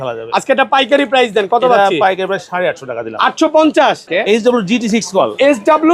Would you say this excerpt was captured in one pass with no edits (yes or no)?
no